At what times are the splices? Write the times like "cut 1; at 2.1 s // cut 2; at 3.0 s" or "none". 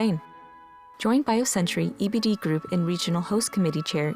none